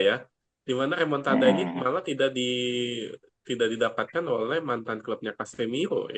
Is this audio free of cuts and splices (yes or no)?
yes